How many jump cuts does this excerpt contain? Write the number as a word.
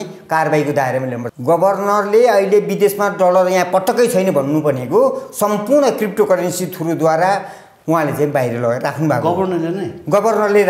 one